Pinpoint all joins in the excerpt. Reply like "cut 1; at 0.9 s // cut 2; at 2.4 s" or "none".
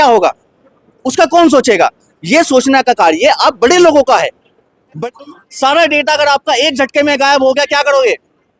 cut 1; at 5.0 s

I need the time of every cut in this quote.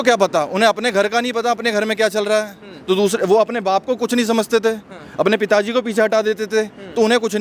none

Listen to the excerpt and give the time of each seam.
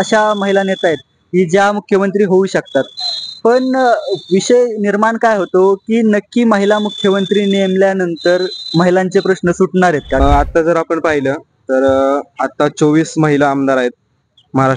cut 1; at 10.2 s

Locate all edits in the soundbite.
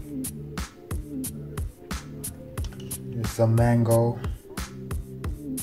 cut 1; at 1.7 s // cut 2; at 3.2 s // cut 3; at 4.2 s

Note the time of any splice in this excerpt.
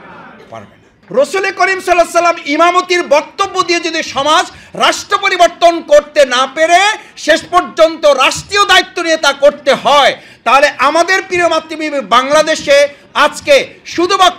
cut 1; at 0.9 s

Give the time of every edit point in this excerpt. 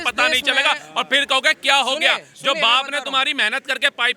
none

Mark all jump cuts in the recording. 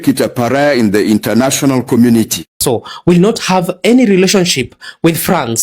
cut 1; at 2.6 s

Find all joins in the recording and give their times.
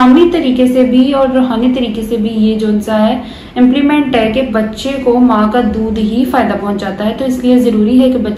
none

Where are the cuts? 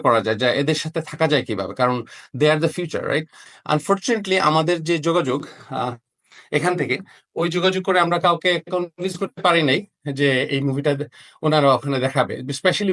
cut 1; at 3.4 s

